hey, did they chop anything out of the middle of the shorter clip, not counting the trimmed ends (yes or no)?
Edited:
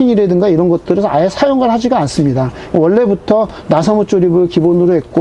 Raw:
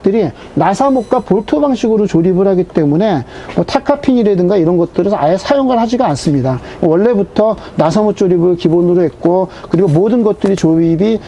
no